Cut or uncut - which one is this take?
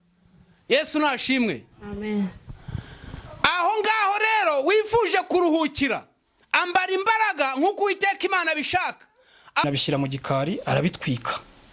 cut